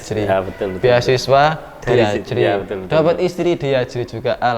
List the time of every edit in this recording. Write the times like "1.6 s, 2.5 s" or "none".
none